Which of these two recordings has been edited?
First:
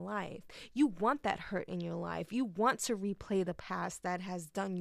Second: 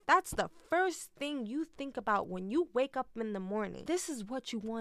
second; 1 cut; at 3.8 s

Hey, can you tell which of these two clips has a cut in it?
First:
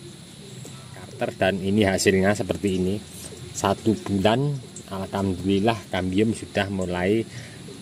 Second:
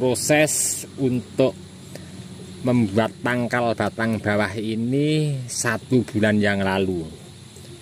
first; 1 cut; at 1.2 s

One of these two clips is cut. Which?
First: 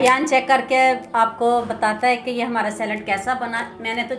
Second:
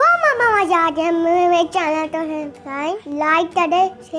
second; 1 cut; at 3.0 s

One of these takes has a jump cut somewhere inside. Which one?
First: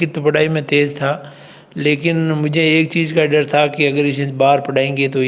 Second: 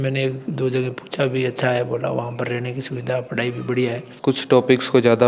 second; 1 cut; at 4.1 s

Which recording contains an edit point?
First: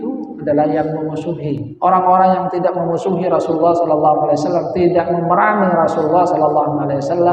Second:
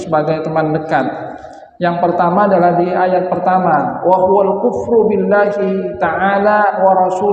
first; 1 cut; at 1.7 s

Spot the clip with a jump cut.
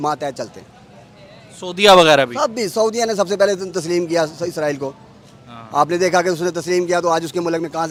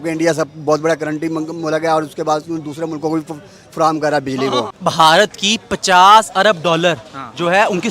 second; 1 cut; at 4.7 s

